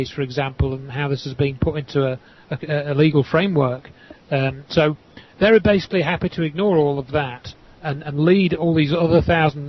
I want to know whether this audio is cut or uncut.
uncut